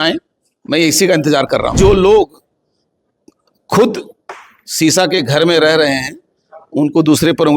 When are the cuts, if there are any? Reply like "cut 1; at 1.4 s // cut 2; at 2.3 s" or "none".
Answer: cut 1; at 1.8 s